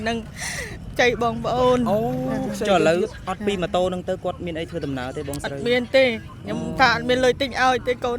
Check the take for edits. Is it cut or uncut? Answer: uncut